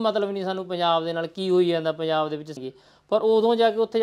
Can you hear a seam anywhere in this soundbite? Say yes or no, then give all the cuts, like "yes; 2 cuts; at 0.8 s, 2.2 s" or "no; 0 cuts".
yes; 1 cut; at 2.5 s